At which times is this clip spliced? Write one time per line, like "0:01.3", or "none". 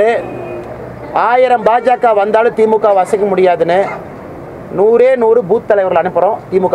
none